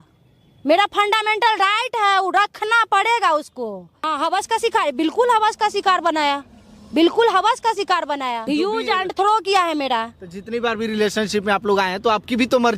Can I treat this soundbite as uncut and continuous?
no; 2 cuts; at 4.1 s, 8.5 s

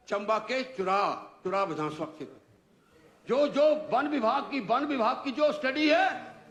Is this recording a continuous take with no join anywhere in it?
yes; 0 cuts

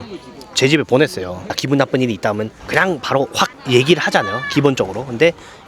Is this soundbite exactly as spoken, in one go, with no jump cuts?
no; 3 cuts; at 1.5 s, 2.6 s, 3.6 s

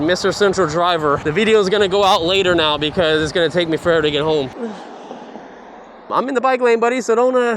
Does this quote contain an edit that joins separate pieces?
yes; 3 cuts; at 1.2 s, 4.5 s, 6.1 s

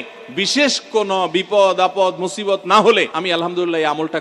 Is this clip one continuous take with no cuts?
no; 1 cut; at 3.2 s

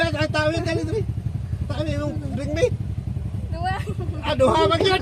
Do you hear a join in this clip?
no; 0 cuts

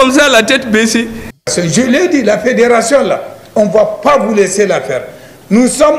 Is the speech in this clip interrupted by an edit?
yes; 1 cut; at 1.2 s

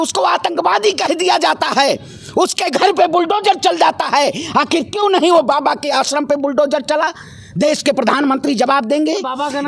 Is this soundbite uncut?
yes; 0 cuts

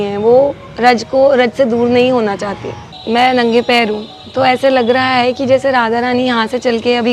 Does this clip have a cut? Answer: yes; 1 cut; at 2.9 s

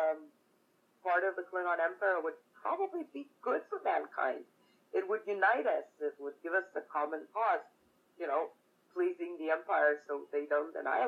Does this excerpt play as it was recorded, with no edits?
yes; 0 cuts

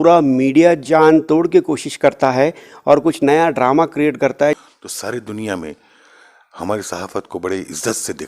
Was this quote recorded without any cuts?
no; 1 cut; at 4.6 s

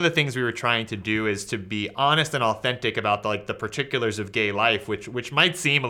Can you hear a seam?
no; 0 cuts

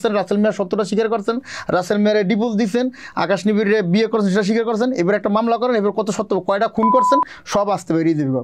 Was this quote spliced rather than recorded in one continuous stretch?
no; 0 cuts

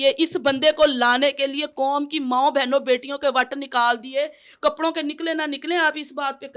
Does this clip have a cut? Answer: no; 0 cuts

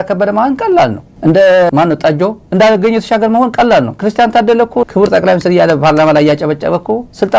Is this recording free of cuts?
yes; 0 cuts

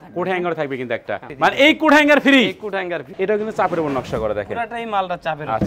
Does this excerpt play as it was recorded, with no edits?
no; 2 cuts; at 1.3 s, 3.0 s

